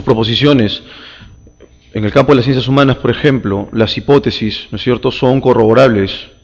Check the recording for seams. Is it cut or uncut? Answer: cut